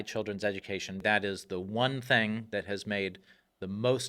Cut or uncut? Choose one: cut